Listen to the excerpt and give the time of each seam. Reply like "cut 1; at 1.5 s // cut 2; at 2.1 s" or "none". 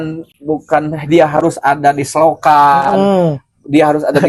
none